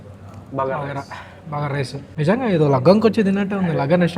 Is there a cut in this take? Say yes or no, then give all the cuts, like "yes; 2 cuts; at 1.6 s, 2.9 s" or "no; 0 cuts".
yes; 1 cut; at 2.0 s